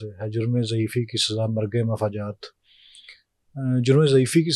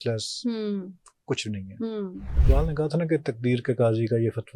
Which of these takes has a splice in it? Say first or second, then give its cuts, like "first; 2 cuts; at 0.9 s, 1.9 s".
second; 1 cut; at 2.3 s